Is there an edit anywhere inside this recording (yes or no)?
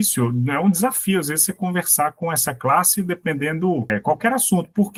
no